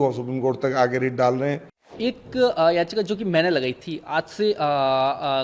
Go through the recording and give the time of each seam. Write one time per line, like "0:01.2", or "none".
0:01.8

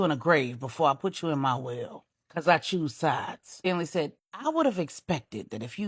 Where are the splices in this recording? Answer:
0:03.8

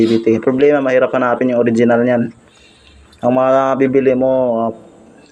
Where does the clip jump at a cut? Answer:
none

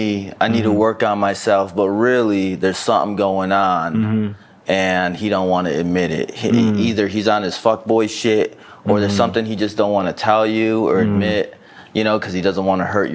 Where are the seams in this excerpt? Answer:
none

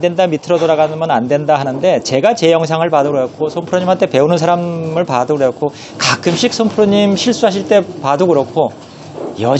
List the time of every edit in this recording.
none

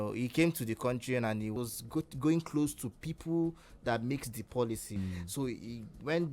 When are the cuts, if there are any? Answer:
0:01.6
0:05.0

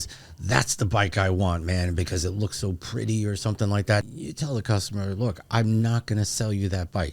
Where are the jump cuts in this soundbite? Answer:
0:04.0

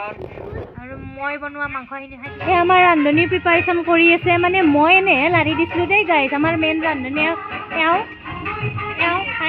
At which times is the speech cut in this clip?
0:02.3

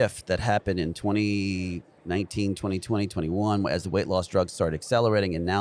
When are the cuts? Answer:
none

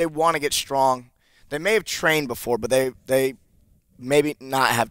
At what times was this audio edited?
none

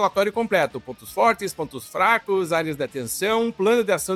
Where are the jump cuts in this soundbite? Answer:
none

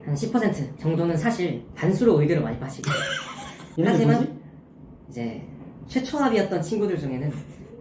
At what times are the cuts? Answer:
none

